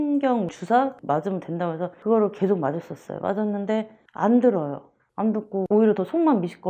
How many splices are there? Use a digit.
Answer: 0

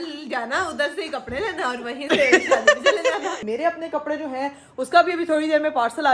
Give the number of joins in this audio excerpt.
1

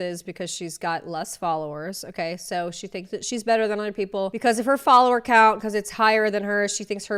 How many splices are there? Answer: 0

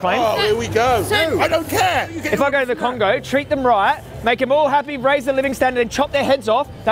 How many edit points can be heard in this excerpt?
1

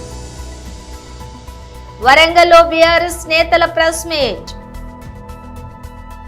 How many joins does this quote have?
2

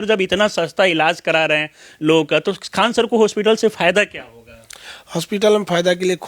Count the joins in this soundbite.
0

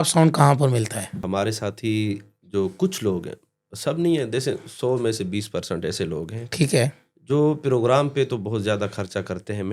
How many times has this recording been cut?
1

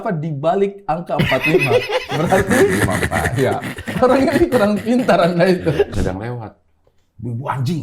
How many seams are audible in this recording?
1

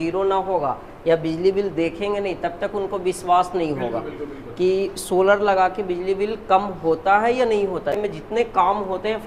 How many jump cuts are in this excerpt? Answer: 1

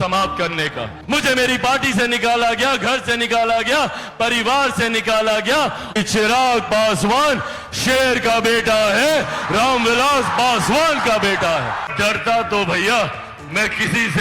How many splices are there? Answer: 3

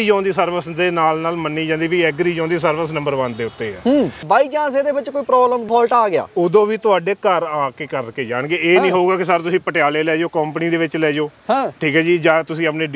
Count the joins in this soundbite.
2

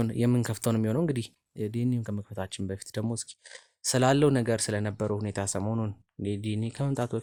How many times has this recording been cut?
0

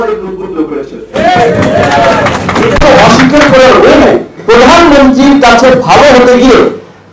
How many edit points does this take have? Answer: 1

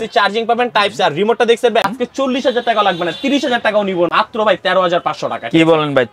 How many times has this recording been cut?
2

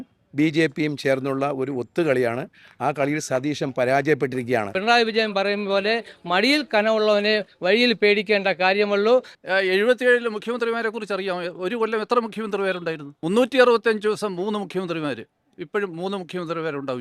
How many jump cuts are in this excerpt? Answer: 3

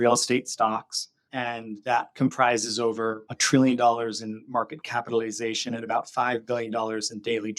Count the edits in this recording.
1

